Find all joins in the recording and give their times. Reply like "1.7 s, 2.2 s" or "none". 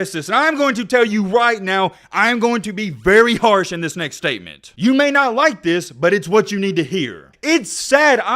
7.2 s